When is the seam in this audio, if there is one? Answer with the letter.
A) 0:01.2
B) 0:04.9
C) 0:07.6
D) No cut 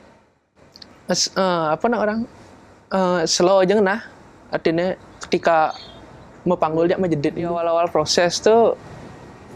C